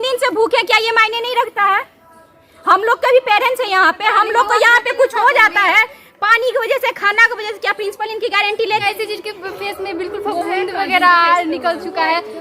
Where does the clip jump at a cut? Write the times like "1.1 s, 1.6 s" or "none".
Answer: 8.8 s